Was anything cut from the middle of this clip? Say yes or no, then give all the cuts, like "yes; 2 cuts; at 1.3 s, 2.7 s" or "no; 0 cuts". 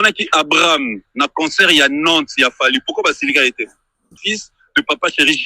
yes; 1 cut; at 4.2 s